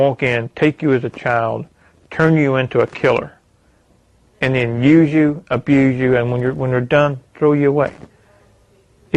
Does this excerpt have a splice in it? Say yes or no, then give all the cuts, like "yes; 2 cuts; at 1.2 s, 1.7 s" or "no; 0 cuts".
no; 0 cuts